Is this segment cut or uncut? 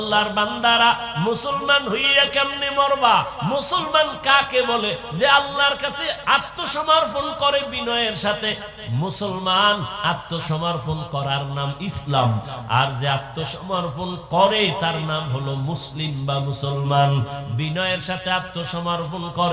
uncut